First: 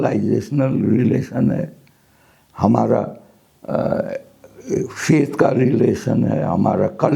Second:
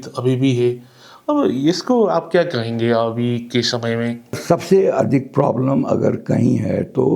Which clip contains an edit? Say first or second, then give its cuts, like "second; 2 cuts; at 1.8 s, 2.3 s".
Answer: second; 1 cut; at 4.4 s